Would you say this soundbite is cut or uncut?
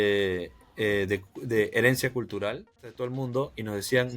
cut